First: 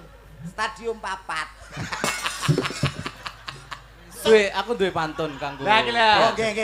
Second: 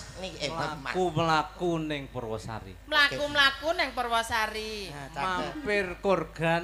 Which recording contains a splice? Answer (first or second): first